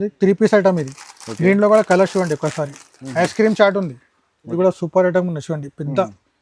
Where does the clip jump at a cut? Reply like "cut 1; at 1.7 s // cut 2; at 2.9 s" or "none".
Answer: cut 1; at 4.5 s